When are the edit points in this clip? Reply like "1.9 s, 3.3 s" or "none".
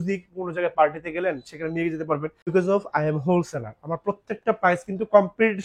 2.4 s